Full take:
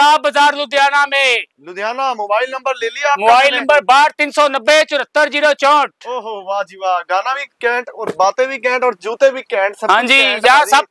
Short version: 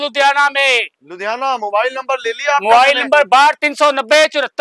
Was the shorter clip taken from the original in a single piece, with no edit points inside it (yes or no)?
yes